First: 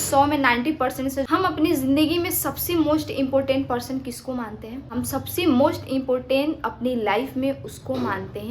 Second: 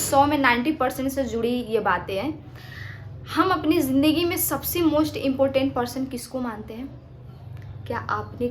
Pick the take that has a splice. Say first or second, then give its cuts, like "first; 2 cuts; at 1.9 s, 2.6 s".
first; 2 cuts; at 1.3 s, 4.8 s